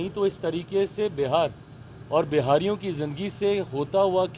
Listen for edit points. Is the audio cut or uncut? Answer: uncut